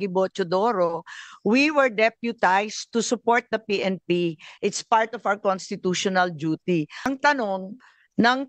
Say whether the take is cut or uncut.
cut